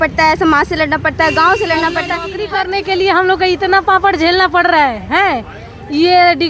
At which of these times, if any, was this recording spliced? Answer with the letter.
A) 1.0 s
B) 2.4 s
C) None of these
B